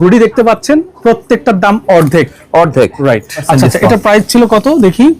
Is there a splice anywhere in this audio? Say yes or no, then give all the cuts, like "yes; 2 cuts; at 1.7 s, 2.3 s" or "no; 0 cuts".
yes; 1 cut; at 3.4 s